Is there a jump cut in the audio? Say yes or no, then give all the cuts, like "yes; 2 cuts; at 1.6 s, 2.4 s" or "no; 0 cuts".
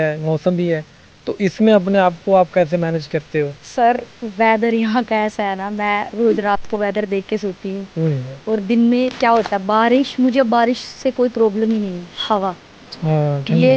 yes; 2 cuts; at 3.6 s, 12.0 s